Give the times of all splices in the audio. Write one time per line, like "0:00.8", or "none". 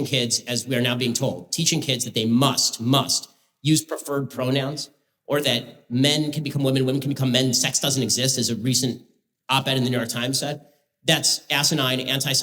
none